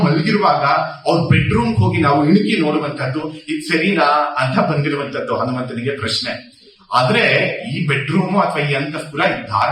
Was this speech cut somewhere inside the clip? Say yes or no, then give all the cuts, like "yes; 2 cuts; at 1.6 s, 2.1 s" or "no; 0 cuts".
no; 0 cuts